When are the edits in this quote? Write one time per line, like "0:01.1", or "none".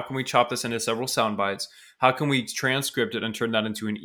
none

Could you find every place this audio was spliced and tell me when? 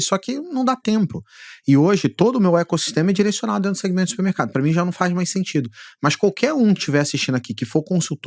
none

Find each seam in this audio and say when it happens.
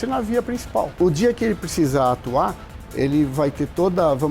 0:01.0

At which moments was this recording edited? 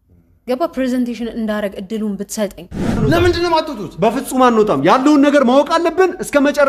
0:03.0

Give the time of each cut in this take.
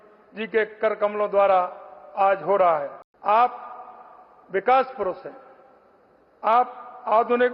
0:03.0

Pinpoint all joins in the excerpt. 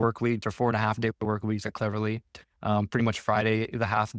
none

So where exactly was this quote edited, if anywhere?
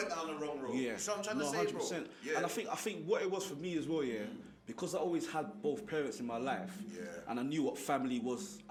none

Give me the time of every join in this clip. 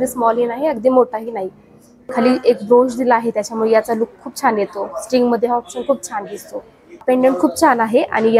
0:02.1
0:07.0

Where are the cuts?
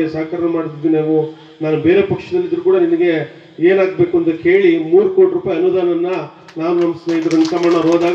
none

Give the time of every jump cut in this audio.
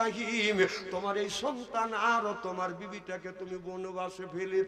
none

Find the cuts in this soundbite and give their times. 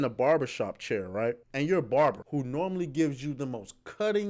0:01.5
0:02.2

